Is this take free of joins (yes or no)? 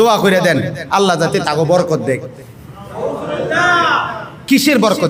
yes